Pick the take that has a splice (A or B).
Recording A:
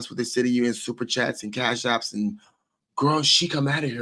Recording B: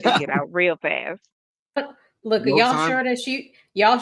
B